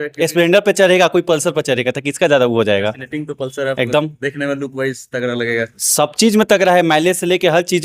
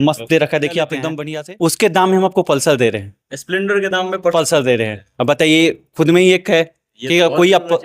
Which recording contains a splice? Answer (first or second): second